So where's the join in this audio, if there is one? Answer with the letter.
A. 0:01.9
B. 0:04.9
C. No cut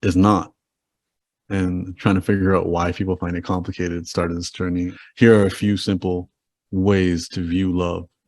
B